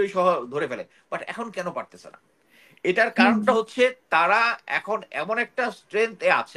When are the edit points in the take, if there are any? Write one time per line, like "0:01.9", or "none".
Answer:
none